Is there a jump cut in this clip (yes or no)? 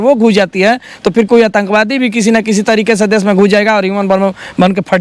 no